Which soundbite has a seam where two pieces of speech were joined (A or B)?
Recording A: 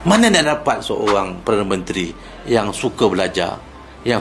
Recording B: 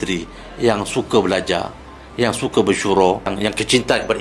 B